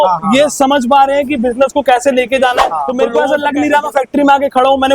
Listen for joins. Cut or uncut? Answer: cut